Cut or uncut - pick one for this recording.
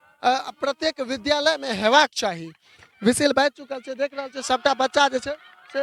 uncut